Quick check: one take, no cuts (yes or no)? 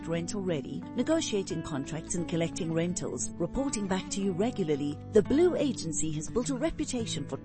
yes